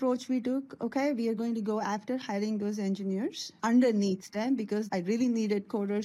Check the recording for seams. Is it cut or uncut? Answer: cut